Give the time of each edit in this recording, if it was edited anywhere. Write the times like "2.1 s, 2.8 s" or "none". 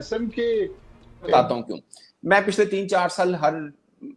1.3 s